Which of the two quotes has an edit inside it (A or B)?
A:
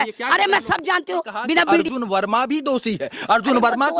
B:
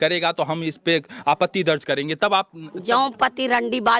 A